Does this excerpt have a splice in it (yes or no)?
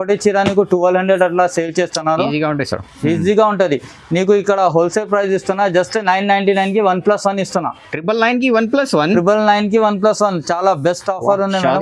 no